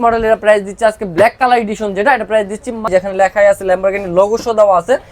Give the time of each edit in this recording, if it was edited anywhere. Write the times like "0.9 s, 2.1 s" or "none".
2.9 s